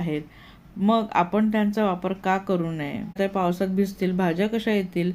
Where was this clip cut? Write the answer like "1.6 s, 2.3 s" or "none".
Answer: 3.2 s